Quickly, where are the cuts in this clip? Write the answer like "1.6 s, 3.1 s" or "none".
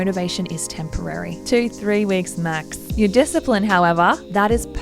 2.8 s